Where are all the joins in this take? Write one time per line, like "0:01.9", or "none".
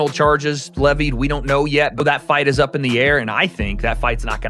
0:02.0